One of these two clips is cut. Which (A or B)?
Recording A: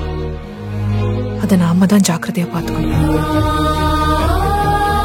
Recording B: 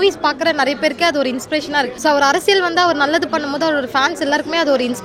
B